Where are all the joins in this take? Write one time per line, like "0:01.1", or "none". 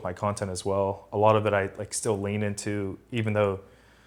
none